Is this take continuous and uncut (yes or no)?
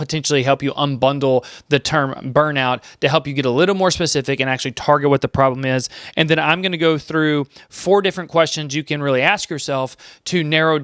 yes